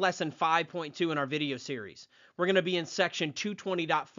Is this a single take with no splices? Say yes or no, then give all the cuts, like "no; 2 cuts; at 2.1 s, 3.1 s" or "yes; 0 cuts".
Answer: yes; 0 cuts